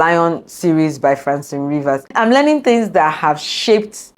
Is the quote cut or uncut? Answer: cut